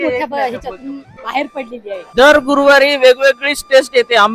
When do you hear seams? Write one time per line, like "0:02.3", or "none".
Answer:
0:01.2
0:02.1